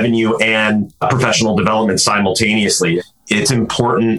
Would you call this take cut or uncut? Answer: cut